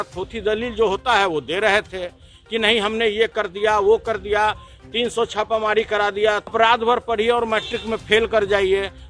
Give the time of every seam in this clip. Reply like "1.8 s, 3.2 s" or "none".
6.5 s

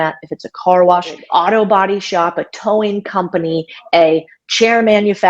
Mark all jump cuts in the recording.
1.2 s

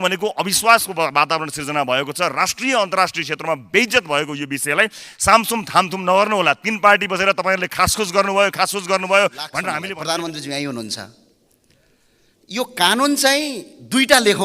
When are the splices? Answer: 9.6 s

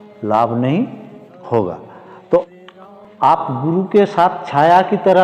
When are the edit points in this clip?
2.5 s

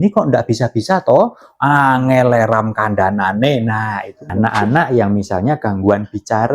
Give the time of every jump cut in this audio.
4.3 s

